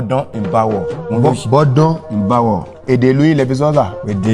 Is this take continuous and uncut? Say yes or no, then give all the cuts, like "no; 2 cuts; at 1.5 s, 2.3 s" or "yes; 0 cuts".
no; 2 cuts; at 1.0 s, 2.8 s